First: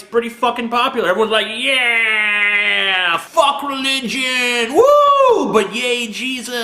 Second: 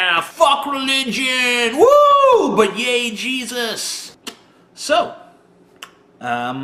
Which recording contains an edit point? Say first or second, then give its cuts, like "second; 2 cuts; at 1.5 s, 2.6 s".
first; 1 cut; at 2.0 s